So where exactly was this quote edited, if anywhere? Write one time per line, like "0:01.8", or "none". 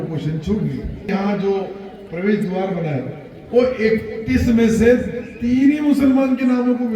0:01.1